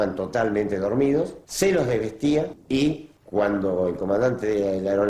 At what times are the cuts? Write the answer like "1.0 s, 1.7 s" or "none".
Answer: 1.4 s, 3.1 s